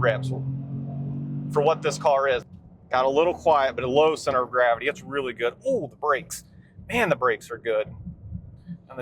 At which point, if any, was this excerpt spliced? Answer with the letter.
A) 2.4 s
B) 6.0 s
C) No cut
A